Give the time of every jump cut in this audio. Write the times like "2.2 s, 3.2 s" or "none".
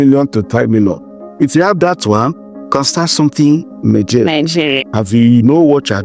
4.8 s